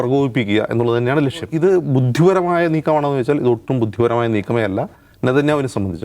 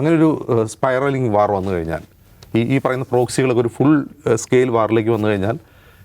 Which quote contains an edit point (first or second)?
first